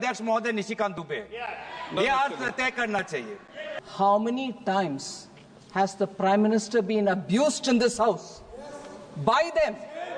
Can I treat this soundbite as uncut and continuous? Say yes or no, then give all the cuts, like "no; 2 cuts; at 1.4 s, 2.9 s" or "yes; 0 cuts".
no; 1 cut; at 3.8 s